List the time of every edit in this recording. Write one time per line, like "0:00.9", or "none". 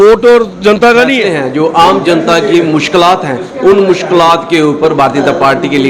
0:01.3